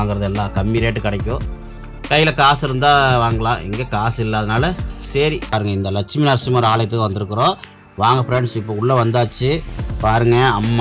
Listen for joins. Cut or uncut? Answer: cut